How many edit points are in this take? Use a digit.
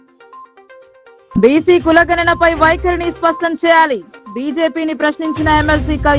1